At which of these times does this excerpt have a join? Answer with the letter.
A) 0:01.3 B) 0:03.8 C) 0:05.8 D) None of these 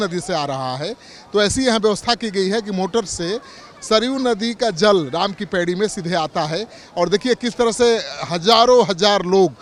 D